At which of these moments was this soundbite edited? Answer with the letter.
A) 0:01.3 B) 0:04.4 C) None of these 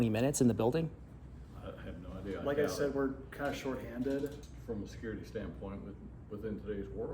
B